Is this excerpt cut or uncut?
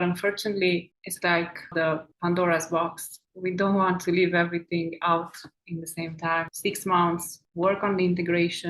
cut